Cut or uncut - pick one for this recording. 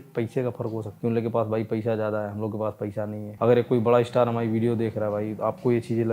cut